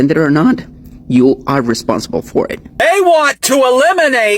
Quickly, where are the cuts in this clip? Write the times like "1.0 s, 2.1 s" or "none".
2.8 s